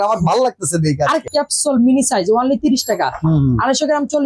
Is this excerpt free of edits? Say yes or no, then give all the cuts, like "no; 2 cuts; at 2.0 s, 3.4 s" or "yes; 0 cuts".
no; 1 cut; at 1.2 s